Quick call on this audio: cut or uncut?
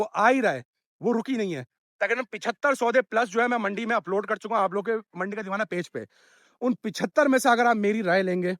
cut